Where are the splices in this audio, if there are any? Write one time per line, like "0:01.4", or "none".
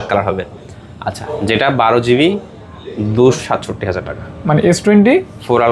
0:03.4